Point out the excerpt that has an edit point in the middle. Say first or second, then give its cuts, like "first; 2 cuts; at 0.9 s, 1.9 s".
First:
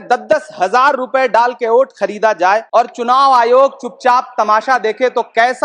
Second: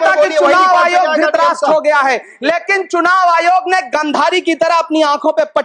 first; 1 cut; at 2.6 s